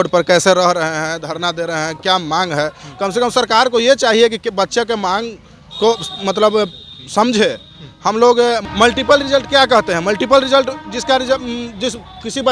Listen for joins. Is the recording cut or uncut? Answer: uncut